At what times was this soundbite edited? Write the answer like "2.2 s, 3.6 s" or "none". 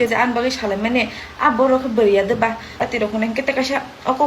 2.8 s